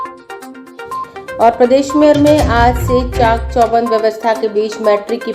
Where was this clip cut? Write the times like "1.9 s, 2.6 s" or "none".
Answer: 1.2 s